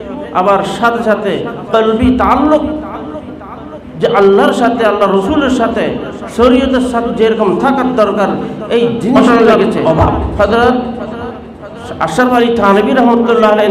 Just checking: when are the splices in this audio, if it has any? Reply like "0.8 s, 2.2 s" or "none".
10.3 s